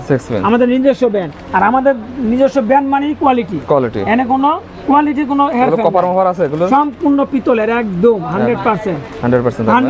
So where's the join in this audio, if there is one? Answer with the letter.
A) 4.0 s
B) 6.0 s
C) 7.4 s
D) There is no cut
D